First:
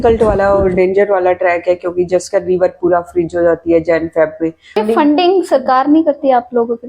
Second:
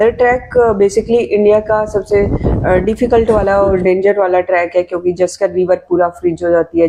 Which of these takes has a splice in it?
first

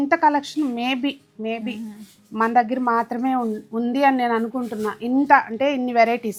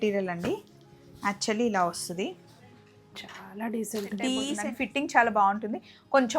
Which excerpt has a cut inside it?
second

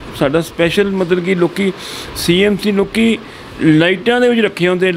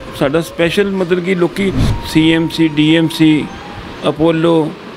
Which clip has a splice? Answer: second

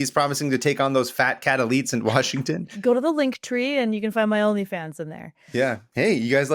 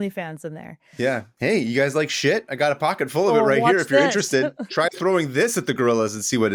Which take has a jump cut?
first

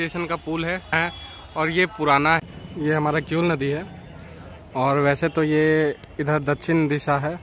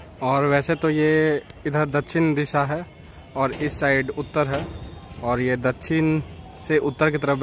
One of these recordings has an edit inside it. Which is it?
first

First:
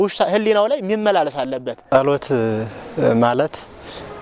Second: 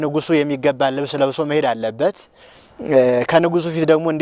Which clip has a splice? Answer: first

